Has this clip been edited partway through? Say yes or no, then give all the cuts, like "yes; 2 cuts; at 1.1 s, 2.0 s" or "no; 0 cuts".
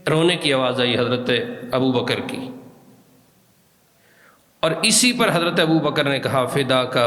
yes; 1 cut; at 3.4 s